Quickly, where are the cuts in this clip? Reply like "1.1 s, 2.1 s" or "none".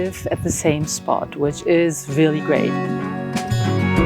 2.7 s